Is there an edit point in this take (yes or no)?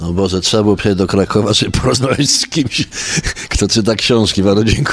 no